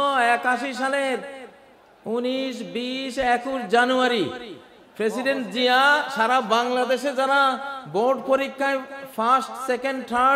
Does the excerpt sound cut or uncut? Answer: uncut